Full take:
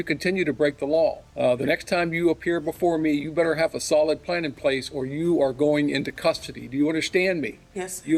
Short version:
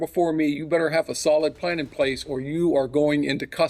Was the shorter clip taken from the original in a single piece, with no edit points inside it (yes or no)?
yes